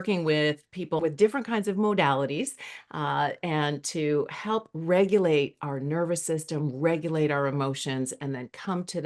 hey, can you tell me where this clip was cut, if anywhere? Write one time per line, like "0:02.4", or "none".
0:01.0

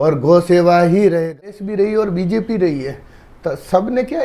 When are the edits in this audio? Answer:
0:01.1

